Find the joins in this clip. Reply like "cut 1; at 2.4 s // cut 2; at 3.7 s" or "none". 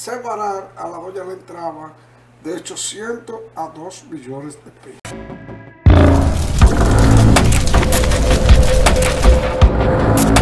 cut 1; at 4.9 s